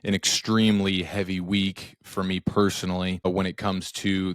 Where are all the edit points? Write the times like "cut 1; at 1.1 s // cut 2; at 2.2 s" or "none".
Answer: cut 1; at 3.3 s